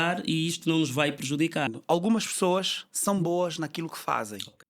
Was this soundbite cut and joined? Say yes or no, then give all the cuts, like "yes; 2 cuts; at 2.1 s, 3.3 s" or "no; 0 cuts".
yes; 1 cut; at 1.7 s